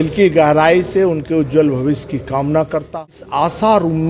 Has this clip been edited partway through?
yes; 1 cut; at 3.2 s

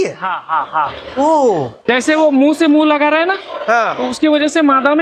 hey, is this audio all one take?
no; 1 cut; at 1.8 s

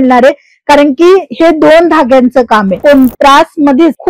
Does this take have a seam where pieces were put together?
yes; 1 cut; at 2.8 s

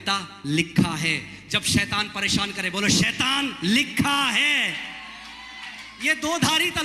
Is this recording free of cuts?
yes; 0 cuts

